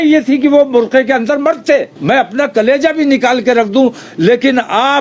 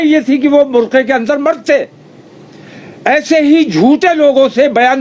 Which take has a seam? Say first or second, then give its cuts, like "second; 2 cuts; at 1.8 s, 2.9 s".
first; 1 cut; at 1.9 s